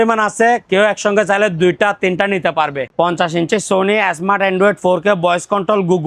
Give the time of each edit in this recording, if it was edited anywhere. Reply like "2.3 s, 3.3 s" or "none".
2.8 s